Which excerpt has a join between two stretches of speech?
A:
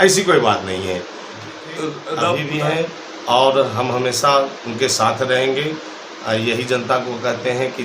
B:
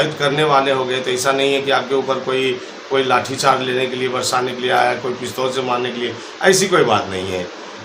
A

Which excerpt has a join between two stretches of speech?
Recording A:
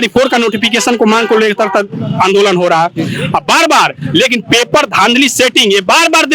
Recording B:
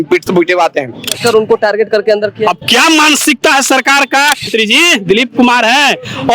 B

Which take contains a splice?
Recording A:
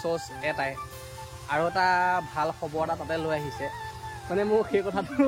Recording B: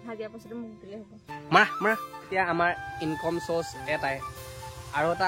B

